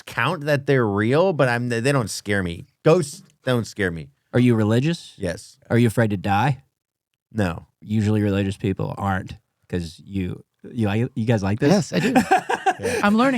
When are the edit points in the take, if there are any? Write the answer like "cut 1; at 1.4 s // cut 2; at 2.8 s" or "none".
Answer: cut 1; at 5.5 s // cut 2; at 7.7 s